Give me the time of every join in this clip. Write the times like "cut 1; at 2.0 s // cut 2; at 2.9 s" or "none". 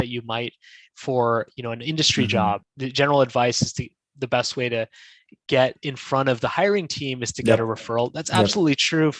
cut 1; at 2.7 s